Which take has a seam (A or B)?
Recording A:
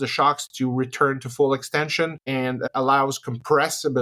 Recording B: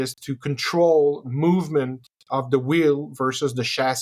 A